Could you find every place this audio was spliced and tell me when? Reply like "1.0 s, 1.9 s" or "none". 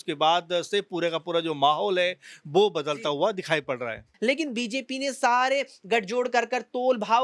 4.1 s